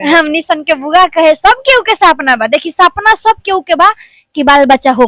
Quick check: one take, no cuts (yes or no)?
yes